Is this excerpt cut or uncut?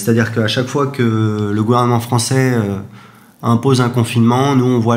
uncut